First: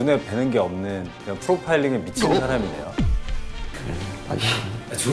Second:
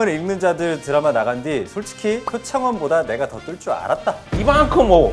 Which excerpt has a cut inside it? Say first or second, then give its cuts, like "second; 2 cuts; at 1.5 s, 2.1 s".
second; 2 cuts; at 2.3 s, 4.3 s